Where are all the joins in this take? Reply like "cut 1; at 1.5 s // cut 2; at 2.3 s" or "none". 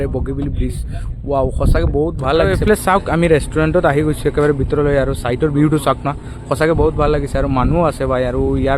cut 1; at 2.5 s